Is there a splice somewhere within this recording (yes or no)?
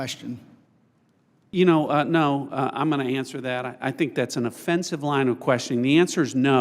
yes